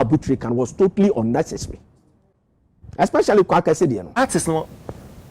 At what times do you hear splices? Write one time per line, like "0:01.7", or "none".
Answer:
0:04.2